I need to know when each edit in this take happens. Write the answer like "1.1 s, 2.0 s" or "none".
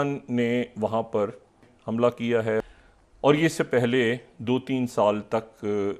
1.7 s, 2.6 s